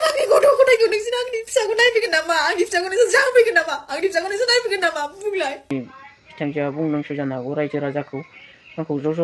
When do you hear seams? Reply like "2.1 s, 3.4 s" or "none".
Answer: 5.7 s